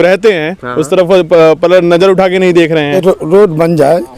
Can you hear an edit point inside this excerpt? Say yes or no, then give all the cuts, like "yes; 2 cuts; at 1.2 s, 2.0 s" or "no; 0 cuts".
yes; 1 cut; at 3.0 s